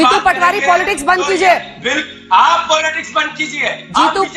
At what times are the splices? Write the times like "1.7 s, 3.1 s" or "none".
none